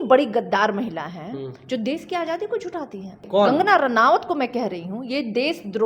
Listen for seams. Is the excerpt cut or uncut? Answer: cut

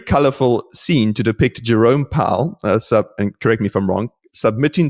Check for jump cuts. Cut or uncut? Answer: uncut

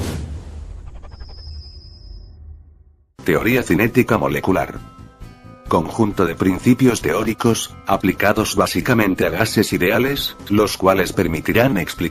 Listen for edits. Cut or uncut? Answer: uncut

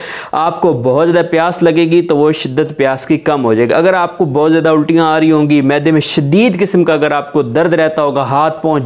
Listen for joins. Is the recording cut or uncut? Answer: uncut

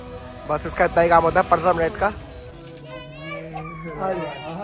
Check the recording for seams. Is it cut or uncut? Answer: cut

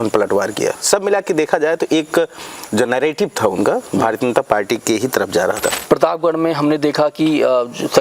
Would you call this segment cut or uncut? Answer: cut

